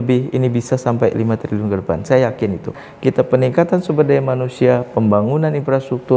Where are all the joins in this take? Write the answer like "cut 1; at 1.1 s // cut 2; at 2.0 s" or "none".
cut 1; at 2.8 s